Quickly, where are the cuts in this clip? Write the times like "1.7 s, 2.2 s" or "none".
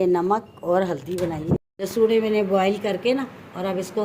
1.6 s